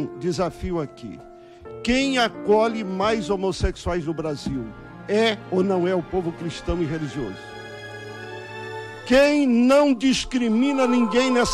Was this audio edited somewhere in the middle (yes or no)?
no